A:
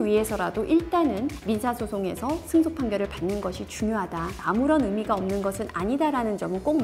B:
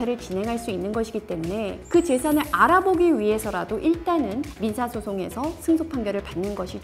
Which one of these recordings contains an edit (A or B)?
B